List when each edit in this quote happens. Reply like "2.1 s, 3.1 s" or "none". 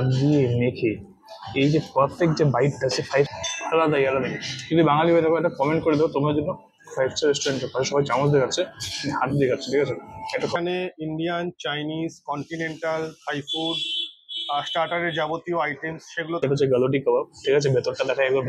3.3 s, 10.5 s, 16.4 s